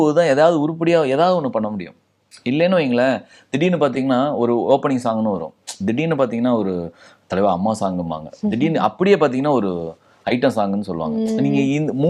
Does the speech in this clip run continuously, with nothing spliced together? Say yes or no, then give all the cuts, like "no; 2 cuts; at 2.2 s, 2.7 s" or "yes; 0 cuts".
yes; 0 cuts